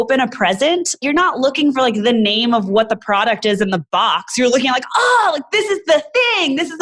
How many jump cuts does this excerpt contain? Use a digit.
1